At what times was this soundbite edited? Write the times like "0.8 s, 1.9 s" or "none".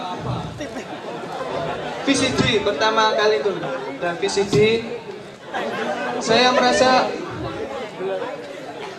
5.5 s